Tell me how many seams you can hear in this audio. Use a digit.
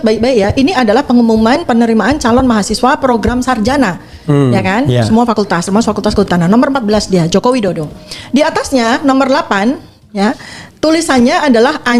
0